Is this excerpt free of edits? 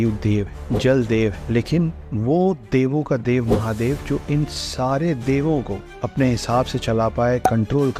yes; 0 cuts

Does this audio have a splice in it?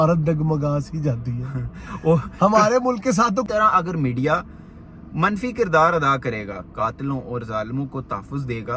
yes; 1 cut; at 3.5 s

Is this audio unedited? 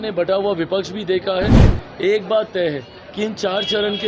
no; 1 cut; at 1.7 s

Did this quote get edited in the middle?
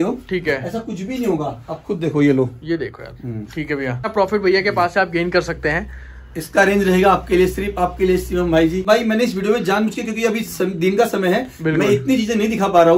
yes; 2 cuts; at 4.1 s, 8.8 s

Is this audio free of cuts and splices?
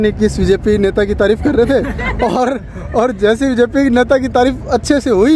yes; 0 cuts

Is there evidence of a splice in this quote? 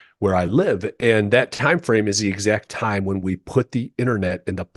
no; 0 cuts

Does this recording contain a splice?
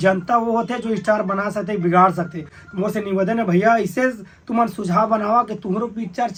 no; 0 cuts

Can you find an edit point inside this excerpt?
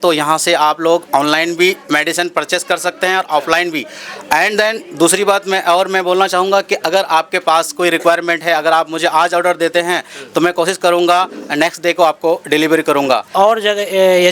yes; 1 cut; at 13.3 s

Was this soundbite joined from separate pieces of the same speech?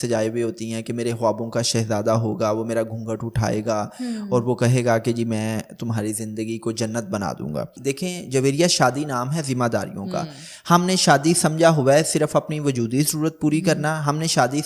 yes; 1 cut; at 7.7 s

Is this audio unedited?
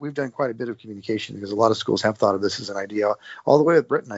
yes; 0 cuts

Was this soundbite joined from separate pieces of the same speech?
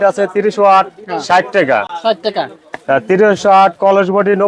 no; 0 cuts

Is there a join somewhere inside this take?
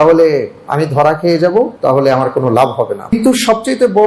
yes; 2 cuts; at 1.7 s, 3.1 s

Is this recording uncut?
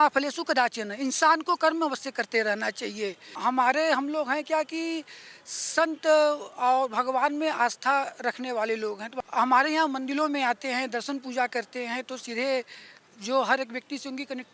no; 2 cuts; at 3.3 s, 9.1 s

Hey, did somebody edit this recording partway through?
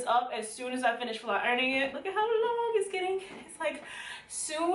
yes; 1 cut; at 2.0 s

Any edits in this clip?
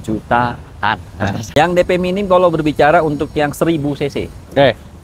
yes; 1 cut; at 1.6 s

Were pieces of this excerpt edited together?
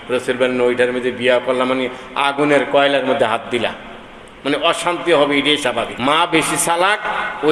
yes; 1 cut; at 5.9 s

